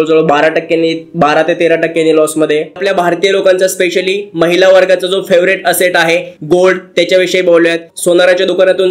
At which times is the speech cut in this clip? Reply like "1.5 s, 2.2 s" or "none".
2.8 s, 7.9 s